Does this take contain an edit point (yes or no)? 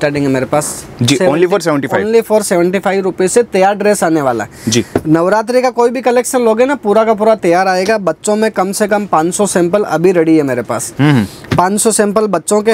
no